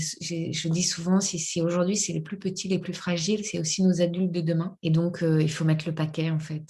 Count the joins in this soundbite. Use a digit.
1